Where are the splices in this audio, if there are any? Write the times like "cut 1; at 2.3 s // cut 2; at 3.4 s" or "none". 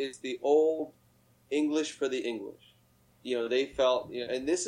cut 1; at 3.1 s